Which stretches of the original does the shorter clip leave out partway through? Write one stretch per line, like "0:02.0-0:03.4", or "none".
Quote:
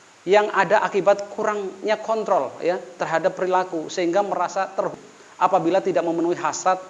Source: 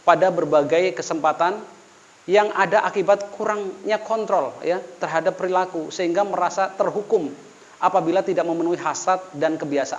0:07.0-0:07.4